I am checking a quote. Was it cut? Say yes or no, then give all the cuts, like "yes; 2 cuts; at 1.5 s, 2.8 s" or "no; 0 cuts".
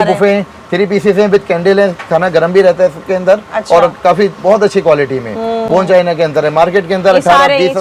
no; 0 cuts